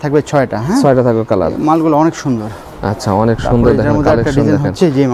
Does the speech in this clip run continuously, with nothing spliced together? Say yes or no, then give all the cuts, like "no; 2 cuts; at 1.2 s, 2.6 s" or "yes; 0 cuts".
yes; 0 cuts